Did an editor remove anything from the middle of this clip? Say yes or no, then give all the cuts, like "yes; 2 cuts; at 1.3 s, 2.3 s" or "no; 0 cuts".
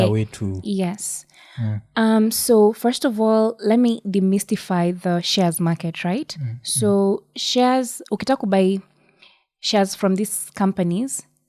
no; 0 cuts